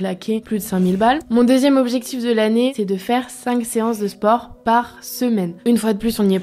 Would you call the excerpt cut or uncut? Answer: cut